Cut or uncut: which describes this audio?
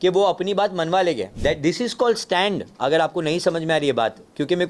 cut